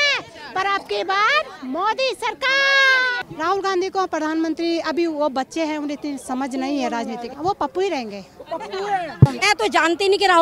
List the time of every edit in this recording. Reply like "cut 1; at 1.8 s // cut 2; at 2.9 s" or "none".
cut 1; at 3.1 s // cut 2; at 7.2 s // cut 3; at 9.4 s